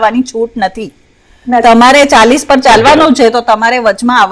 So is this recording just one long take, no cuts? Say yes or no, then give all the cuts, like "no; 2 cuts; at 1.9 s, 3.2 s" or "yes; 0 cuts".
yes; 0 cuts